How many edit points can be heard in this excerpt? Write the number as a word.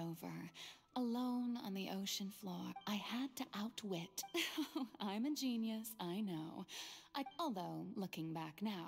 three